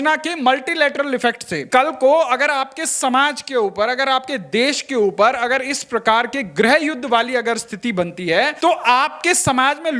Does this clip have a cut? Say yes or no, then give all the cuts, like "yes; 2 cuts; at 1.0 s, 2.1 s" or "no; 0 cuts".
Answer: yes; 2 cuts; at 1.7 s, 8.5 s